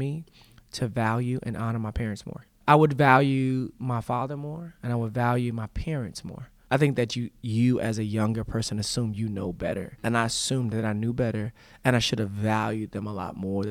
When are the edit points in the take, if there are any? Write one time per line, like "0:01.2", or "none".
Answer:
0:02.6
0:06.5